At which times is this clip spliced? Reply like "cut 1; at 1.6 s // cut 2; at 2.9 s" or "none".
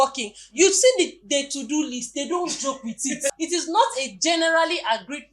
cut 1; at 3.3 s